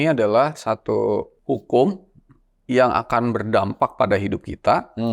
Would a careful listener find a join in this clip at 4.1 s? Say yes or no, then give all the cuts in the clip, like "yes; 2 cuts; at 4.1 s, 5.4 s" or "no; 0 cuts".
no; 1 cut; at 1.3 s